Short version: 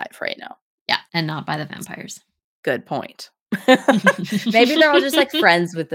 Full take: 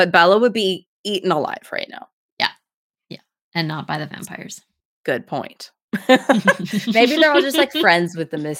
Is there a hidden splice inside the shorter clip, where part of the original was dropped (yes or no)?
yes